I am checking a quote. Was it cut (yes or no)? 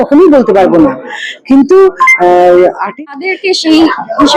yes